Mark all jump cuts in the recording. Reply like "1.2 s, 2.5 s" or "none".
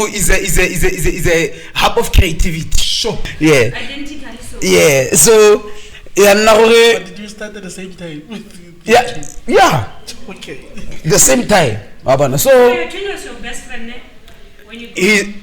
3.3 s